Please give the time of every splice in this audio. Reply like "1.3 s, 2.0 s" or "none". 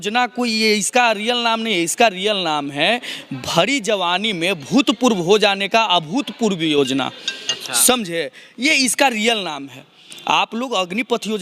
none